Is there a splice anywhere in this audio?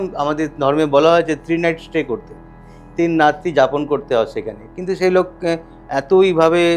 no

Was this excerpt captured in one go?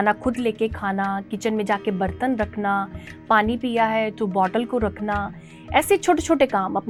yes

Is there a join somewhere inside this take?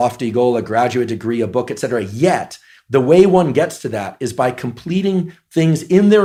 no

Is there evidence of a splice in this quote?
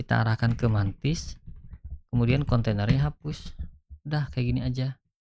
no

